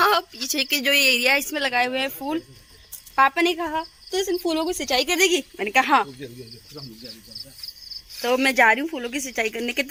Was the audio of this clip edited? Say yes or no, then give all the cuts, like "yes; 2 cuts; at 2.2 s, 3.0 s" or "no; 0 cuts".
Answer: no; 0 cuts